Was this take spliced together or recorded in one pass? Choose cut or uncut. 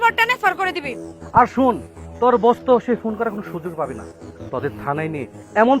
cut